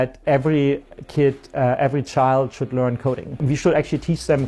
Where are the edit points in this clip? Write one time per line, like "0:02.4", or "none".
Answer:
0:03.3